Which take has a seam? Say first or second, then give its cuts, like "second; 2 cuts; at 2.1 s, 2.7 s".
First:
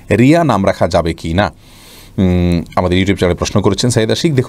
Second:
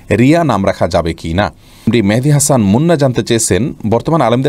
second; 1 cut; at 1.8 s